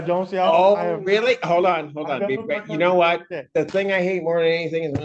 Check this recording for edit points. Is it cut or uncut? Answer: uncut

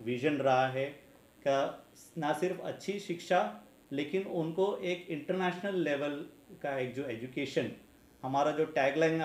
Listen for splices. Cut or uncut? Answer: uncut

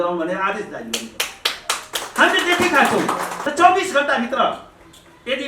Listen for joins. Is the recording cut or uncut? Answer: cut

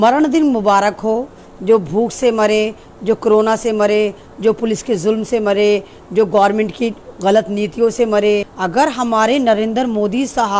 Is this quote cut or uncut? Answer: cut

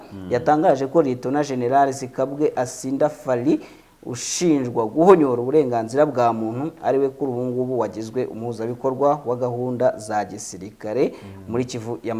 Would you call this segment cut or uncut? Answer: uncut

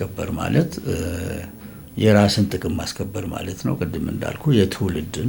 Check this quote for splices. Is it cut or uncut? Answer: uncut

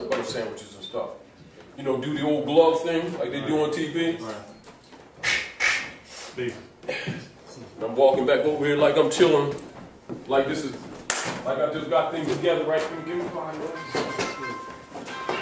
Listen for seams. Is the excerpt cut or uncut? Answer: uncut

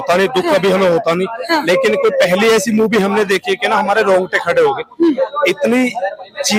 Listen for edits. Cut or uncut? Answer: uncut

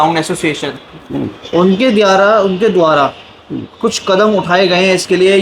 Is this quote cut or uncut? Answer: uncut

